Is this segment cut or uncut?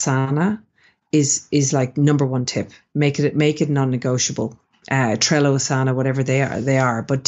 uncut